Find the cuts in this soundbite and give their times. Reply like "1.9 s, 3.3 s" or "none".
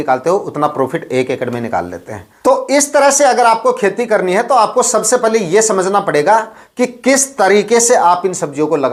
none